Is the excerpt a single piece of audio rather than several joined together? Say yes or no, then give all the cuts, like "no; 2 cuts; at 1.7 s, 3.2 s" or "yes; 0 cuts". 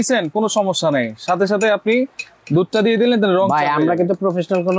yes; 0 cuts